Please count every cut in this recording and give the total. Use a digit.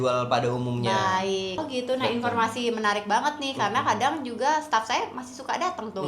1